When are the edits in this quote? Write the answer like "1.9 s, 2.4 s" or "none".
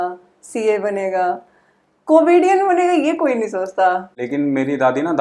4.1 s